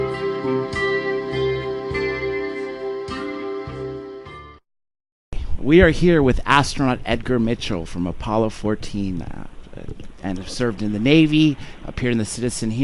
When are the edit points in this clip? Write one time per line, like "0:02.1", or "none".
0:01.3

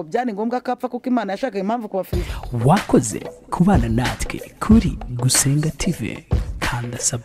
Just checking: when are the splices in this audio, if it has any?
0:02.3

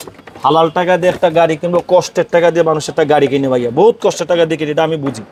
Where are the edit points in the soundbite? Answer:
none

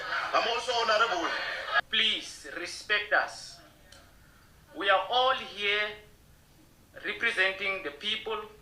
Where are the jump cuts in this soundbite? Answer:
0:01.8

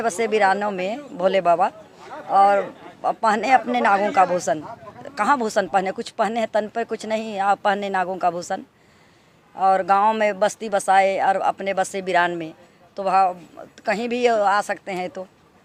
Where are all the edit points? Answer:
none

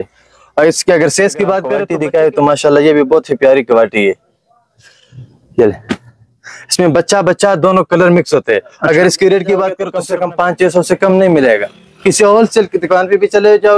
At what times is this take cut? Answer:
0:01.8
0:09.9

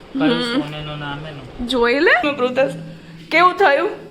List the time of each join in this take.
0:02.2

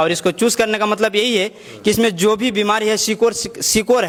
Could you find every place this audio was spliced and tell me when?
none

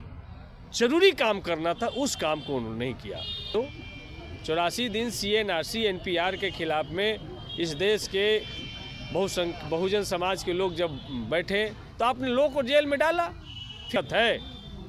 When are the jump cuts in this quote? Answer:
0:03.5
0:14.0

